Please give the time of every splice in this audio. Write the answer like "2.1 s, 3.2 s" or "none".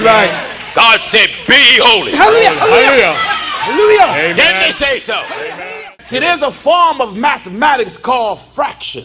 5.8 s